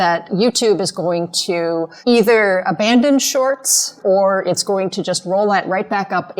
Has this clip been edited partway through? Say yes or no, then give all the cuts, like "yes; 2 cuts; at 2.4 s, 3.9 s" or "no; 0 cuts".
yes; 2 cuts; at 1.9 s, 4.0 s